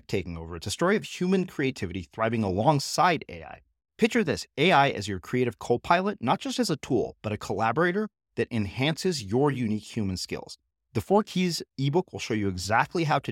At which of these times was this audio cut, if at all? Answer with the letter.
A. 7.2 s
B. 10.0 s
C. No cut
C